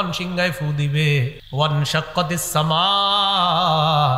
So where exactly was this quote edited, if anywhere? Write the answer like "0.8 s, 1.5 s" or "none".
1.4 s